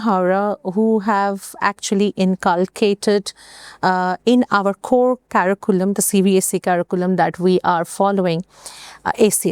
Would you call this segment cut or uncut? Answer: uncut